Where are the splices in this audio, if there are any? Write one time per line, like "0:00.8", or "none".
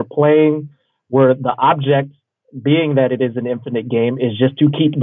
none